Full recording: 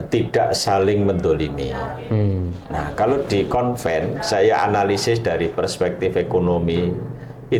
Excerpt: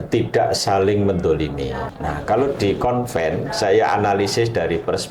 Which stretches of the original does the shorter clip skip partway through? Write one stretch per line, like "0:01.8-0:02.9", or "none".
0:01.9-0:02.6